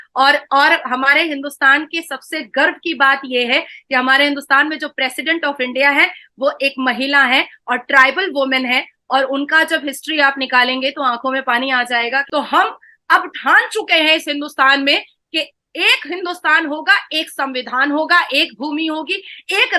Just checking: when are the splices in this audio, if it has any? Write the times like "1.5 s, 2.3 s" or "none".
12.2 s